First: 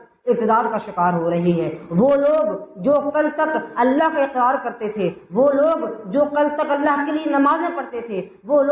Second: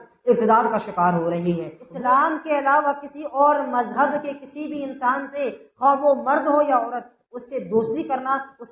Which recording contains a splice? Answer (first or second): second